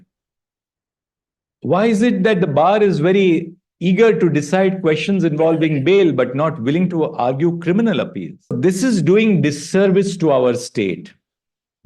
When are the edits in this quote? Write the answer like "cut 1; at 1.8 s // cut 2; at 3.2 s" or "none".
cut 1; at 8.5 s